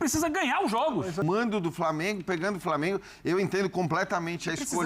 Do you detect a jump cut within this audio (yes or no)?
yes